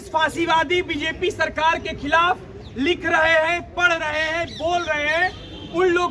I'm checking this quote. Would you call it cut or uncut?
uncut